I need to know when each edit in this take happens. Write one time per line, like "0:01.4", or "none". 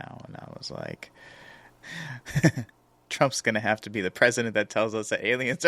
0:01.7